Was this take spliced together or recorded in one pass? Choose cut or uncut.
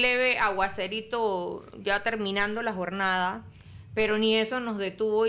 uncut